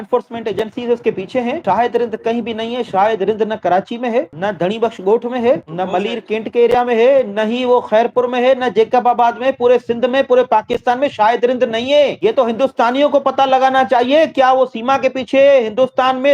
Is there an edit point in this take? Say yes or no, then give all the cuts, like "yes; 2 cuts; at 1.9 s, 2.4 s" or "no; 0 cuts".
no; 0 cuts